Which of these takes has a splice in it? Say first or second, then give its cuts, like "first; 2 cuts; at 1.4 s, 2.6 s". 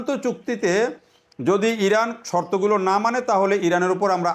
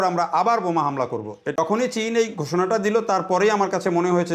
second; 1 cut; at 1.5 s